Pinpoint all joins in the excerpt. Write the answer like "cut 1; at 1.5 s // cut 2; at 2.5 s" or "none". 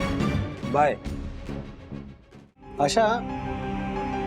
cut 1; at 2.7 s